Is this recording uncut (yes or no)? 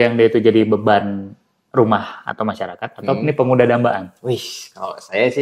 yes